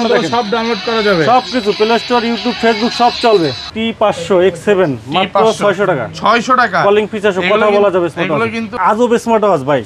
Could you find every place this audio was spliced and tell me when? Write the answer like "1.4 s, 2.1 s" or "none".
3.7 s, 8.7 s

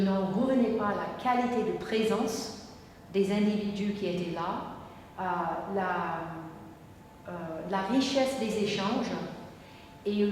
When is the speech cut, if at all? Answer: none

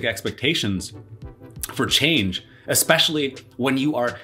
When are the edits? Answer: none

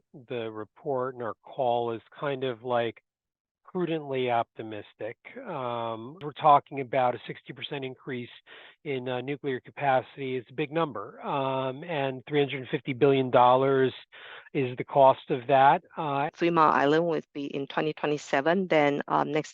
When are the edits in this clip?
6.3 s, 16.3 s

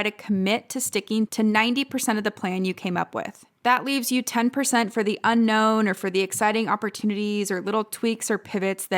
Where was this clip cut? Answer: 1.3 s, 3.4 s

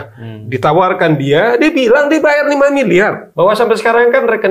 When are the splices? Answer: 3.2 s

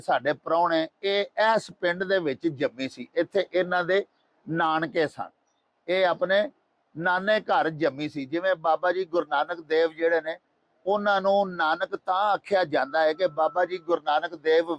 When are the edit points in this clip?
none

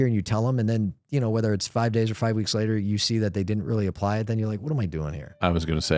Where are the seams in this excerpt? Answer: none

